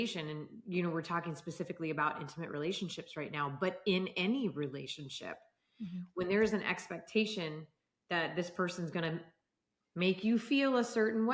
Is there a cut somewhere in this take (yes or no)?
no